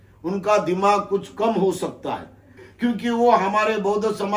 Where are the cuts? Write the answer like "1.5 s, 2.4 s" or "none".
2.6 s